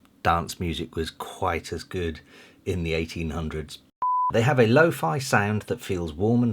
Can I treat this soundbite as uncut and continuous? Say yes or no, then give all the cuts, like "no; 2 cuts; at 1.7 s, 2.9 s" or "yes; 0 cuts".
no; 1 cut; at 4.3 s